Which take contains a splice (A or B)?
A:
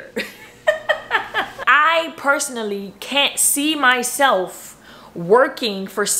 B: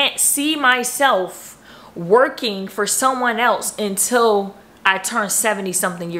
A